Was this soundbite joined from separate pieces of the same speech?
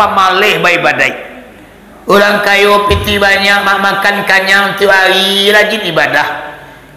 no; 0 cuts

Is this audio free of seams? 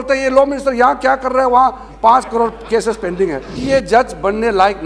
no; 1 cut; at 3.5 s

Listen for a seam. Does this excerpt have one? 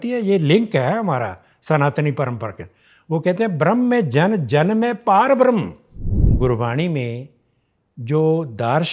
yes; 1 cut; at 6.3 s

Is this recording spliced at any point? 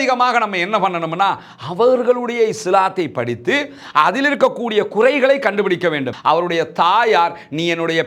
yes; 1 cut; at 6.1 s

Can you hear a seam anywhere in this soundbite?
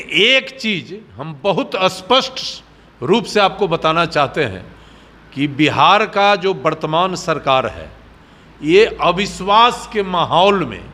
no; 0 cuts

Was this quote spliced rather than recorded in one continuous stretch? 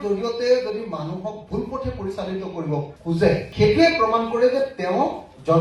yes; 1 cut; at 3.5 s

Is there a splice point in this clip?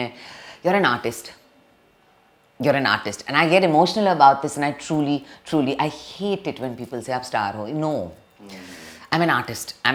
no; 0 cuts

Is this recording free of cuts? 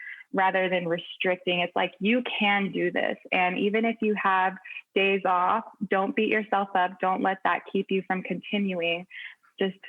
yes; 0 cuts

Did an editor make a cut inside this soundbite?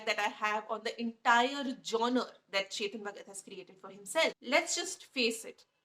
yes; 1 cut; at 4.4 s

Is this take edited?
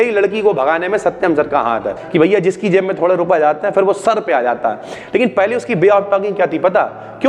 yes; 1 cut; at 2.0 s

